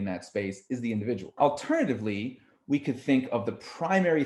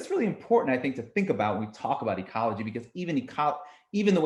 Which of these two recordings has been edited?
first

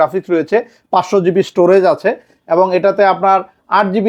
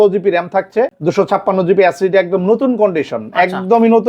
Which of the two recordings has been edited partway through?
second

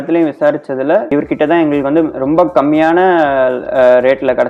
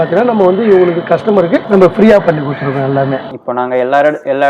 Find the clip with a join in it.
second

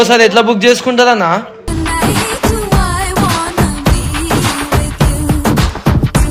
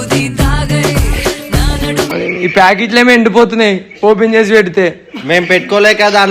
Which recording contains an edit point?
second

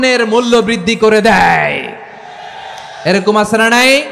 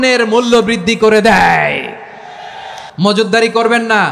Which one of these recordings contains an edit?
second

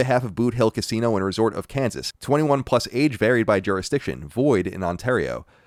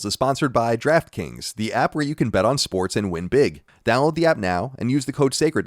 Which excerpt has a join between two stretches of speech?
second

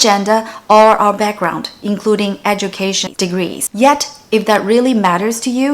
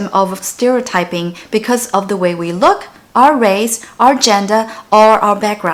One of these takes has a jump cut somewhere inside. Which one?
first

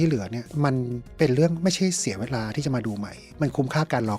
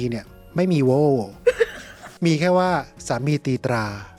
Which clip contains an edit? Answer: first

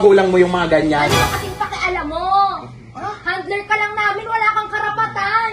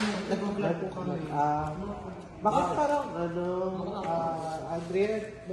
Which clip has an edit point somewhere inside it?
first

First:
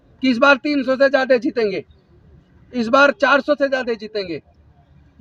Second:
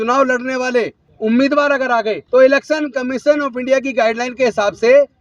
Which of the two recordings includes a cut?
second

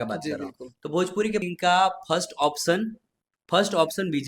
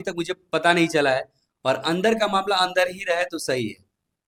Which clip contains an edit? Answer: first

